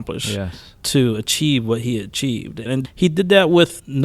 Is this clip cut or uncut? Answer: cut